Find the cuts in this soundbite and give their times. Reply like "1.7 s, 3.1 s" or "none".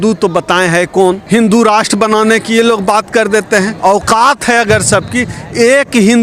1.2 s, 3.7 s